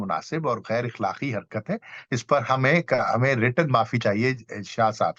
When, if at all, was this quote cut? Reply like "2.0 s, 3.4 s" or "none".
none